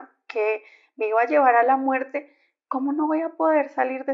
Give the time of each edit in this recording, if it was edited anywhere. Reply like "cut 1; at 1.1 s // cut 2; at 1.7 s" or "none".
none